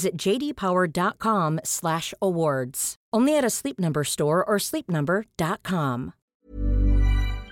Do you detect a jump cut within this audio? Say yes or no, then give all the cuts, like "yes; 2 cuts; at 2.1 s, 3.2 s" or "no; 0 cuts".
yes; 1 cut; at 6.3 s